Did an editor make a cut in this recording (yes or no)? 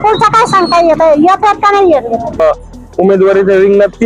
yes